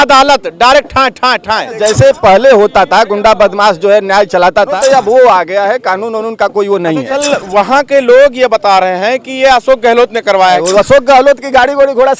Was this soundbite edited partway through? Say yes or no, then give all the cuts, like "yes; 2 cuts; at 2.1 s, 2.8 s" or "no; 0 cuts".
yes; 4 cuts; at 1.8 s, 4.7 s, 7.1 s, 10.6 s